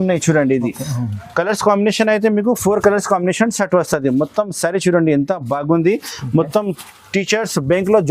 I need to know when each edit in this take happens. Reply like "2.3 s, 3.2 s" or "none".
none